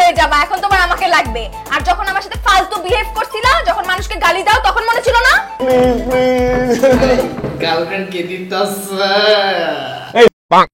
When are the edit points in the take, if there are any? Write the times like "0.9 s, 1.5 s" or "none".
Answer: 5.6 s